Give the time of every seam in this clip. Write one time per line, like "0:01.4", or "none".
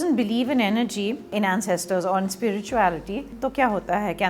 0:01.3
0:03.4